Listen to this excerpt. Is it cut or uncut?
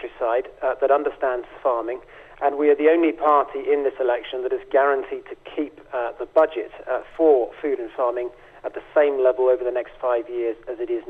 uncut